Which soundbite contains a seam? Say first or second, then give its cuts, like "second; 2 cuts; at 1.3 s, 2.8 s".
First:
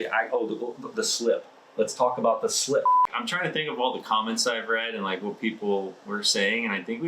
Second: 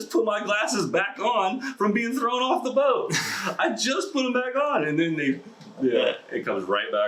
first; 1 cut; at 3.1 s